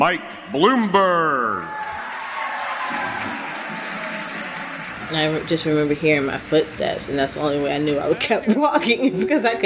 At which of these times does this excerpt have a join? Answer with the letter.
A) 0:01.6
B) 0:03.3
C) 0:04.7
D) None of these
D